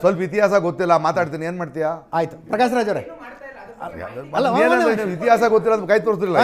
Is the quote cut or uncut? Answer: uncut